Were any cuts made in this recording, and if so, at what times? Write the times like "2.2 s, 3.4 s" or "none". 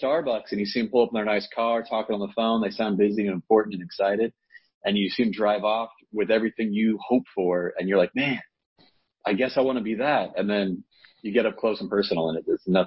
none